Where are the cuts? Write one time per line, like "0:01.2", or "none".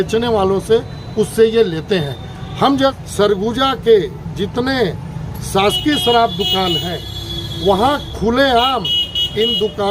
0:03.0